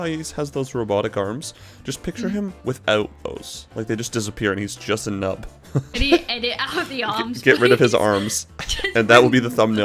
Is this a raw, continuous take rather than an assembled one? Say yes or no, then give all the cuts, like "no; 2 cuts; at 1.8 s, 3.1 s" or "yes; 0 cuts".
no; 1 cut; at 5.9 s